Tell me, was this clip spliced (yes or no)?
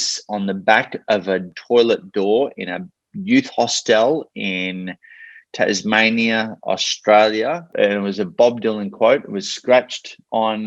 yes